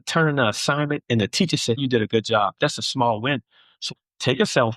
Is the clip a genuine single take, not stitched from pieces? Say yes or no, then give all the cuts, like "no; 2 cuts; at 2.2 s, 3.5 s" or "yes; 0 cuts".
no; 2 cuts; at 1.8 s, 3.8 s